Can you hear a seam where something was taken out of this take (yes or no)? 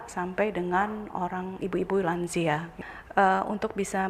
yes